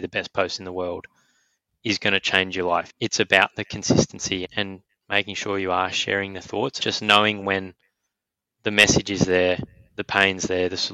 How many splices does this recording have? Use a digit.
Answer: 3